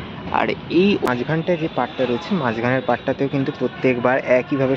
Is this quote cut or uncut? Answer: cut